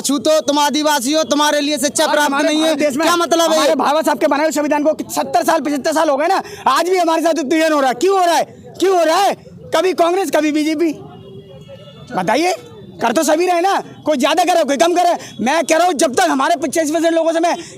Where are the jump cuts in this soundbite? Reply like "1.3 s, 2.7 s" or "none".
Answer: none